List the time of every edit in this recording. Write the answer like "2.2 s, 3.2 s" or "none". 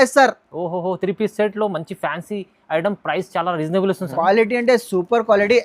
4.0 s